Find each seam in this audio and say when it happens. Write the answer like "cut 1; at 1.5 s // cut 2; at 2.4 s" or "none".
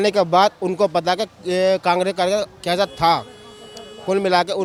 none